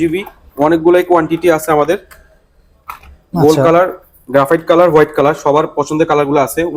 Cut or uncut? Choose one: uncut